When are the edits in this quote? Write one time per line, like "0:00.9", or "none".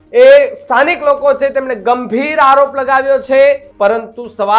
0:03.7